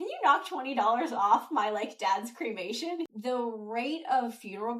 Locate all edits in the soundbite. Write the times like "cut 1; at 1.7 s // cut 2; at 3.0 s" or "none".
cut 1; at 3.1 s